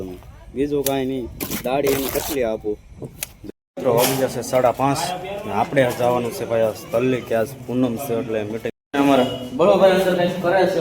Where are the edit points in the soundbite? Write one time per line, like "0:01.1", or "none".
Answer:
0:03.4
0:08.7

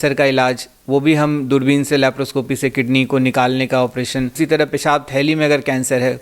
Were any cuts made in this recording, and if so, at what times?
0:04.3

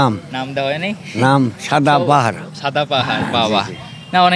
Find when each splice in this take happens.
none

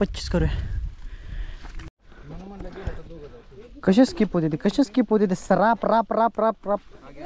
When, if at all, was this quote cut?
0:01.9

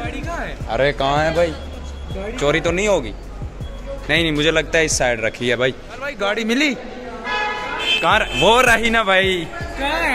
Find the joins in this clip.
0:06.1

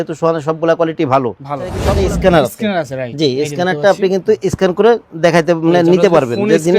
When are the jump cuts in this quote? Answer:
0:01.8

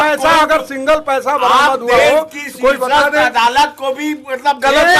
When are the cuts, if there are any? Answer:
none

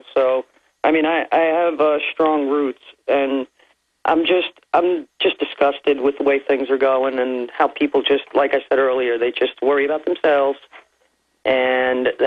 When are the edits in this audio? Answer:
0:11.3

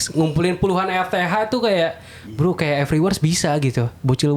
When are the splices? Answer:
none

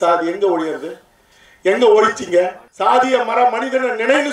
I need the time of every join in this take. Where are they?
0:02.6

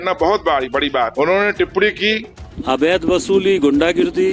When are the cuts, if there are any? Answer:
0:01.1
0:02.6

